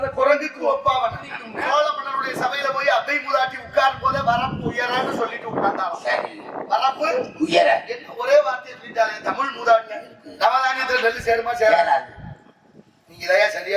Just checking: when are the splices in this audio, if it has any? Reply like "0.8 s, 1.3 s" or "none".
1.4 s, 10.2 s